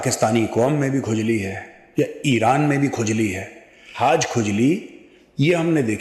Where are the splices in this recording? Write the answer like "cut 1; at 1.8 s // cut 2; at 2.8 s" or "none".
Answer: cut 1; at 3.9 s